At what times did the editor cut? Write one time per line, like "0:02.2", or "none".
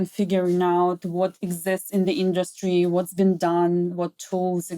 none